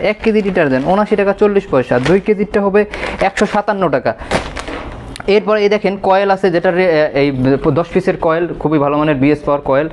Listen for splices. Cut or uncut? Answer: uncut